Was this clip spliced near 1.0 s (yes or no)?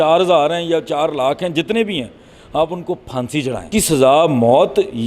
no